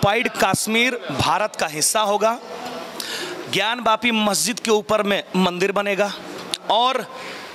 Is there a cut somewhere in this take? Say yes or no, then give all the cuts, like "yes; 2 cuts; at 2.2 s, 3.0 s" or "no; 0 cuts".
no; 0 cuts